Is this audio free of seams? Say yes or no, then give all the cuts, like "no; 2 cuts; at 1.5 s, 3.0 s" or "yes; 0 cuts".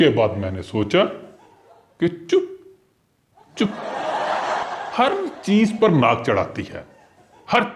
no; 1 cut; at 4.6 s